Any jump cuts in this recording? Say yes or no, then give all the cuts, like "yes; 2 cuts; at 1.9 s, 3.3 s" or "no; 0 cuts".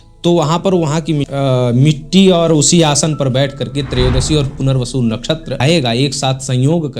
yes; 2 cuts; at 1.3 s, 5.6 s